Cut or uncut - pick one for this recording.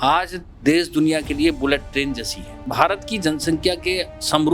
cut